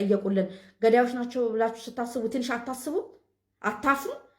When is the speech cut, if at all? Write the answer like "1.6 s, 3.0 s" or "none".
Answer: none